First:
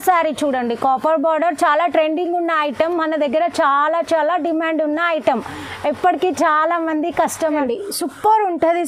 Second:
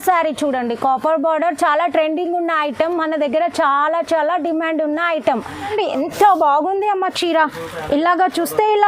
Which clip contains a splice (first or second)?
second